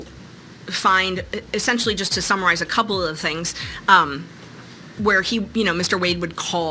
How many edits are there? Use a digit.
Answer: 0